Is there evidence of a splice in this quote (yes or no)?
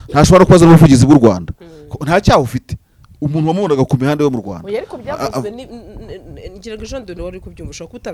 no